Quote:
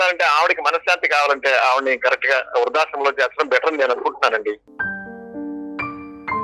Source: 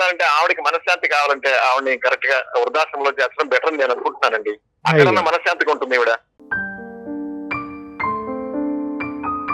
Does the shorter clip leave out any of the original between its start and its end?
yes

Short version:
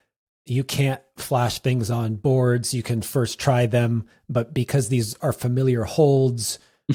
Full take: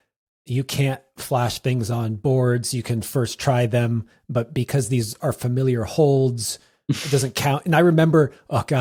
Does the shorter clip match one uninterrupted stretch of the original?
yes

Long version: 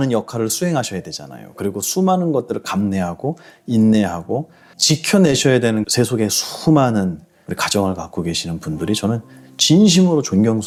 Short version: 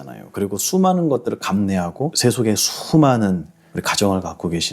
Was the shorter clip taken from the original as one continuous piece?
no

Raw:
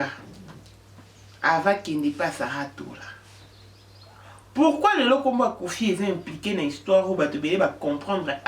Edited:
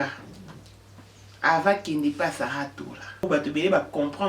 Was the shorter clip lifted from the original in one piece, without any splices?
no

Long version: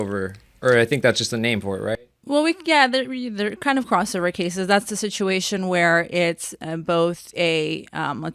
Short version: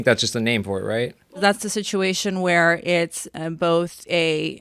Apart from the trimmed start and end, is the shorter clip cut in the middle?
yes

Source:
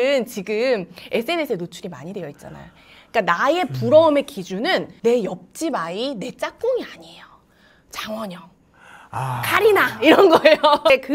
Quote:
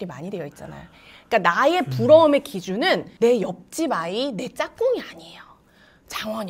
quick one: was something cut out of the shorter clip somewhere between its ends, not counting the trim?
no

